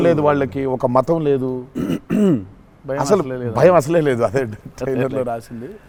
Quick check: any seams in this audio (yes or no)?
no